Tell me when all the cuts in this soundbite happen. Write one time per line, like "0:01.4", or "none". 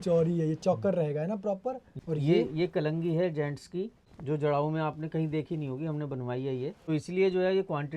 0:01.9
0:04.1
0:06.8